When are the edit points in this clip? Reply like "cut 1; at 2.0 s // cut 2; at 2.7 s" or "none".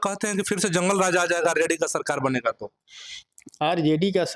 none

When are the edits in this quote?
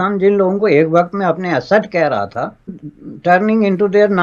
cut 1; at 2.7 s

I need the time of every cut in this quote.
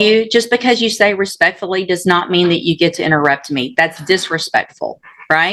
none

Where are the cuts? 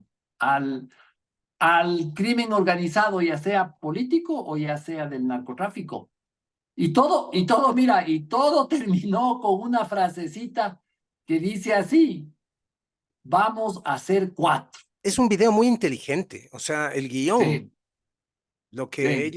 cut 1; at 14.8 s

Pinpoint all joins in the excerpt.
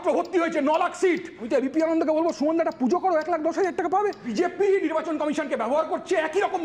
cut 1; at 1.4 s // cut 2; at 4.3 s

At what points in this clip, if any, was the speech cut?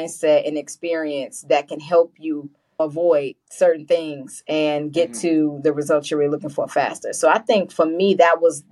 cut 1; at 2.8 s

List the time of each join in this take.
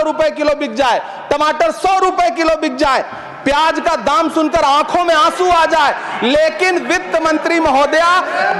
none

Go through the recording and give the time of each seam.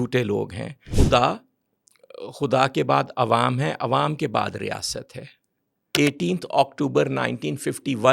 cut 1; at 0.9 s // cut 2; at 5.9 s

